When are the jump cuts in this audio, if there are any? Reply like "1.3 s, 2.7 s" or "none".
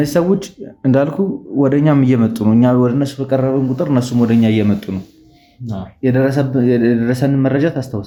none